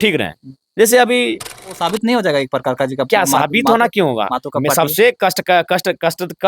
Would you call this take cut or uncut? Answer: cut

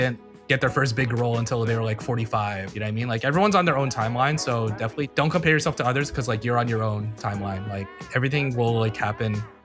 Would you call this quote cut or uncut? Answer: cut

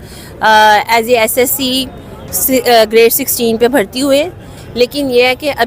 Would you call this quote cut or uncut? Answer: uncut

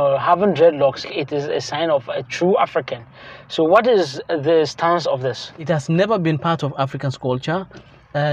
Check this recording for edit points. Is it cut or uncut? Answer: cut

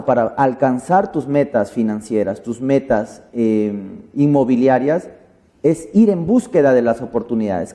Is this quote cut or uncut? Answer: uncut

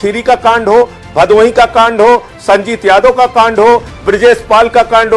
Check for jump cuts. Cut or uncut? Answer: uncut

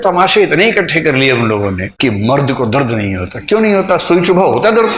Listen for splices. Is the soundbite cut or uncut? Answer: uncut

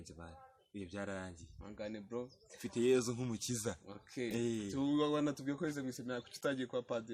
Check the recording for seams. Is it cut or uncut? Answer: uncut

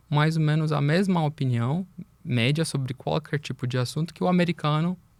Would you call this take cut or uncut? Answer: uncut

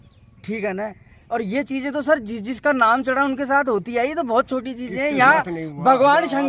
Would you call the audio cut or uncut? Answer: uncut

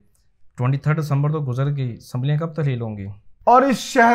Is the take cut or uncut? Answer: cut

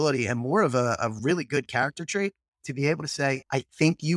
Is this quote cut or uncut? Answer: uncut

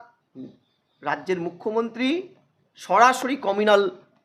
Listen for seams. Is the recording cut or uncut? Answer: uncut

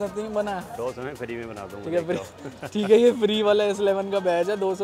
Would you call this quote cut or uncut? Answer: uncut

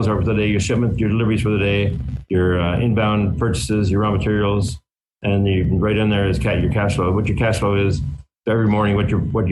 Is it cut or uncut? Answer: uncut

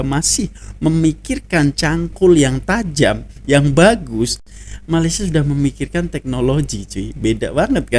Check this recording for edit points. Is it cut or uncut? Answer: uncut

